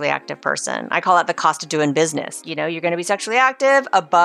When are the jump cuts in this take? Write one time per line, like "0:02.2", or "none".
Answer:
0:02.4